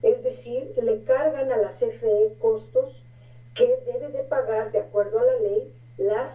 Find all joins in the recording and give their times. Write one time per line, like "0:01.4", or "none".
none